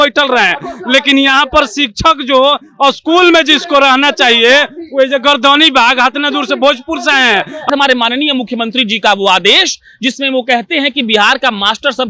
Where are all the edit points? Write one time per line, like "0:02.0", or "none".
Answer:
0:07.7